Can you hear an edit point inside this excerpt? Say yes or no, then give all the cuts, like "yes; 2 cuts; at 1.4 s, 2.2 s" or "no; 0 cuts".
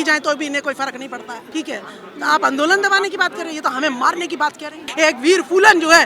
yes; 2 cuts; at 1.4 s, 4.9 s